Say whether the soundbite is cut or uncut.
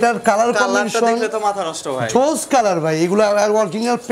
uncut